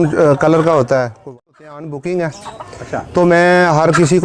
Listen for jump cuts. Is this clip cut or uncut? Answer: cut